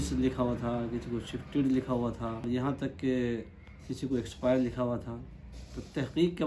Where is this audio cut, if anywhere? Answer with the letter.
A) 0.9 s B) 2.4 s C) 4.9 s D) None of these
B